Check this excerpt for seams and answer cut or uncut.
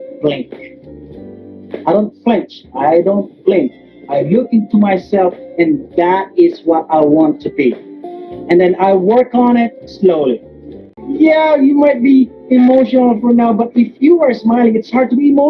cut